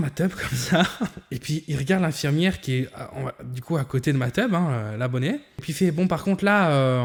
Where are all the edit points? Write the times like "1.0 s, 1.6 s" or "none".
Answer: none